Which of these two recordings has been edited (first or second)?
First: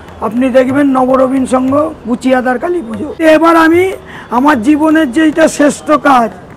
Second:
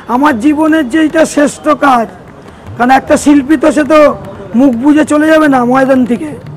first